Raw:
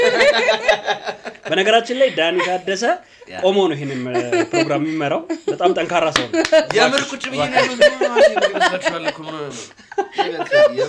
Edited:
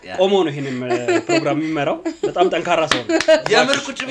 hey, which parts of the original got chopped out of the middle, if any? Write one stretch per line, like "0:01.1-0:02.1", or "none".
none